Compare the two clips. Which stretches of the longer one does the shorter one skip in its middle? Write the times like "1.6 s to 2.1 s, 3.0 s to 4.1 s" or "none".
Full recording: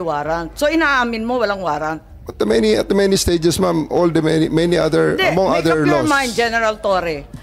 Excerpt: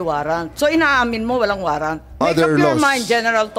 2.2 s to 5.5 s

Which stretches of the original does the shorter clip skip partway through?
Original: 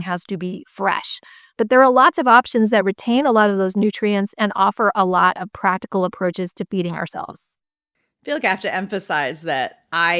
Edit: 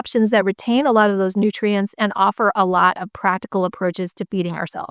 none

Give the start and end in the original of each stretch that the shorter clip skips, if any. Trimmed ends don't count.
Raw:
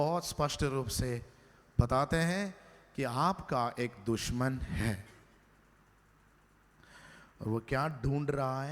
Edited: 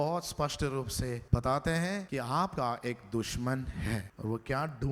1.2 s to 1.7 s, 2.9 s to 3.4 s, 5.1 s to 7.3 s

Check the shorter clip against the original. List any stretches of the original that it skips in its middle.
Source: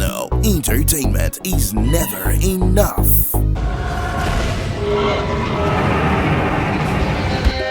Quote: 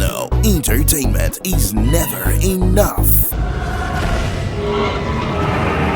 3.3 s to 3.5 s

